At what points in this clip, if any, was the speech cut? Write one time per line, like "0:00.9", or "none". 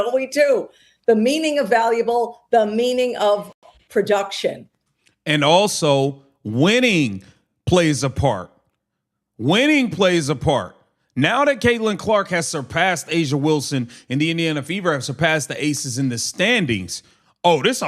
0:16.6